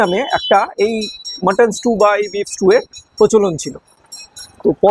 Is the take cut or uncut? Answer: uncut